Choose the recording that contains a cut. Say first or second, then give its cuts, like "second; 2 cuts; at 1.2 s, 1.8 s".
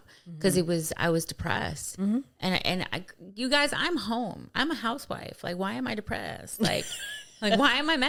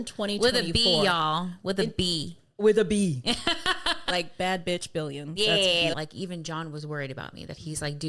second; 1 cut; at 5.9 s